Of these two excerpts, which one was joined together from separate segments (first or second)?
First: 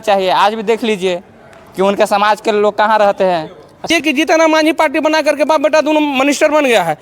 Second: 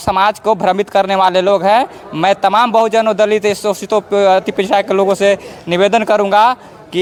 first